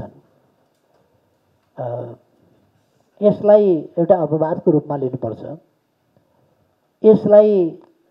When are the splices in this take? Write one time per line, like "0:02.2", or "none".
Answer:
none